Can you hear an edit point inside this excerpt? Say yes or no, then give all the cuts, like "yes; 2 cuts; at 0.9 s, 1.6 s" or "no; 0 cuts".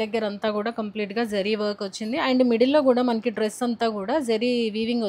no; 0 cuts